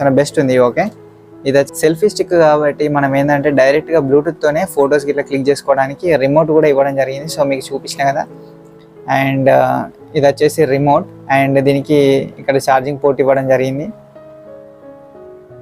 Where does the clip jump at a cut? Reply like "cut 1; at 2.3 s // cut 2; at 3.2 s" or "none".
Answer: cut 1; at 1.7 s